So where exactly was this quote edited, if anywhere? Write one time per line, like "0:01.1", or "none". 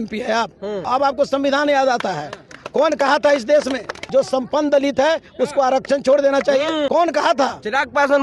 0:00.8
0:04.0
0:06.9

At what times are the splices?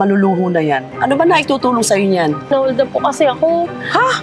0:02.5

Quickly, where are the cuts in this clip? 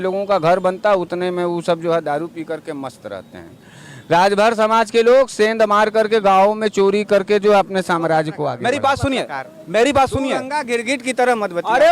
0:08.4

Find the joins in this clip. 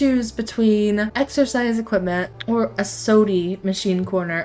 0:01.1
0:02.3

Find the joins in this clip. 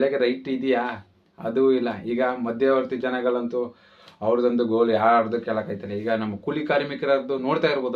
none

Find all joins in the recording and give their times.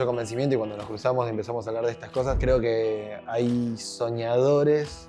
0:02.4

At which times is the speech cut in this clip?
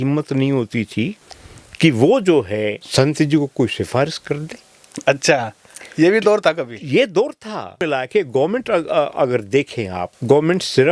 0:07.9

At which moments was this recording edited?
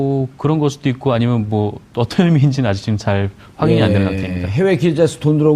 0:01.4

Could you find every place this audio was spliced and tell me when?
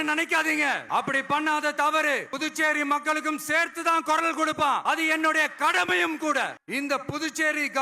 0:00.8
0:02.3
0:04.8
0:06.6

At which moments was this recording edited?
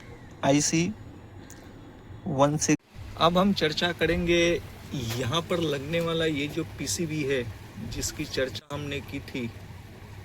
0:03.0

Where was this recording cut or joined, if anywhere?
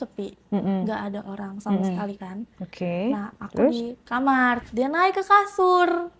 0:04.6

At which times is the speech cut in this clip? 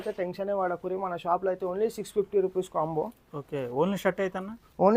none

